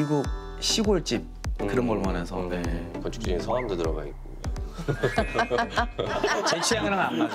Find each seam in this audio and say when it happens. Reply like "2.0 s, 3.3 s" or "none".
2.9 s, 4.7 s, 6.1 s